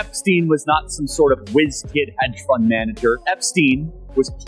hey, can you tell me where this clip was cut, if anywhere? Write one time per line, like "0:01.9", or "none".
0:03.2